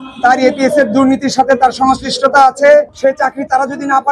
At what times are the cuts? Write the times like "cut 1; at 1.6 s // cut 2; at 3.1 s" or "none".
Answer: cut 1; at 2.9 s